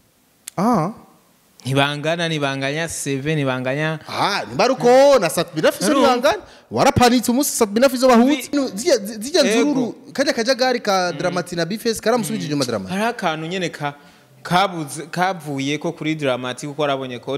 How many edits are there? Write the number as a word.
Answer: one